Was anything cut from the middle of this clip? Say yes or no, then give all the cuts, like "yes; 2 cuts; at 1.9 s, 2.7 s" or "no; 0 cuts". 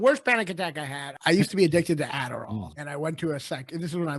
yes; 2 cuts; at 1.0 s, 2.5 s